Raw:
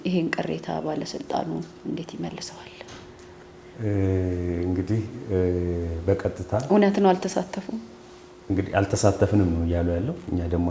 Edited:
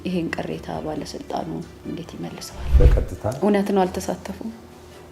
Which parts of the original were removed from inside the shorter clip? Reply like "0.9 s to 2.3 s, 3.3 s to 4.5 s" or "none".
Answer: 2.7 s to 6.0 s